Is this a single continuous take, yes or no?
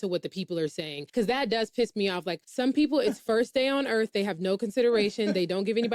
no